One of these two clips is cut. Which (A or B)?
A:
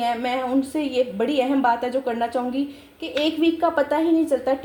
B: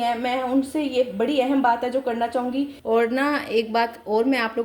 B